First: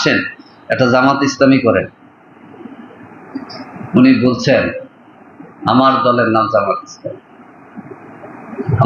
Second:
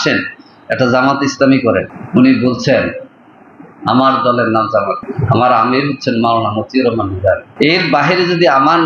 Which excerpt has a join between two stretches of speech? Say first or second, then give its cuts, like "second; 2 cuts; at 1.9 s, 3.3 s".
second; 3 cuts; at 2.0 s, 5.1 s, 7.5 s